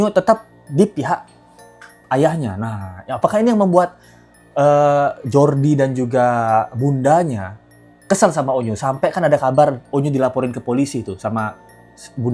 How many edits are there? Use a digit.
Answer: 0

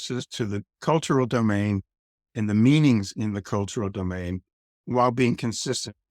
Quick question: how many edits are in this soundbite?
1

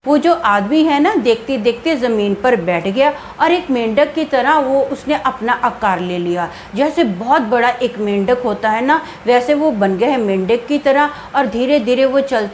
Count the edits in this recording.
0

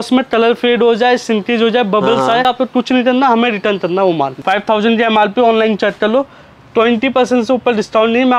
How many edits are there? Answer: 2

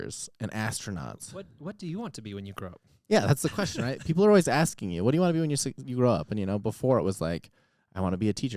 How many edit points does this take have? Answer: 0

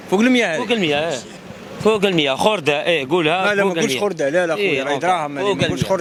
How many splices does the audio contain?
0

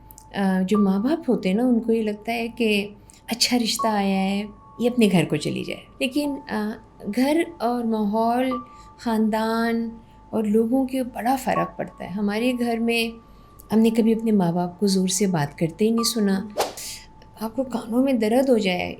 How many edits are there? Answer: 2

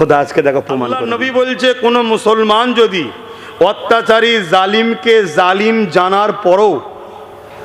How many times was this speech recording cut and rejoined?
1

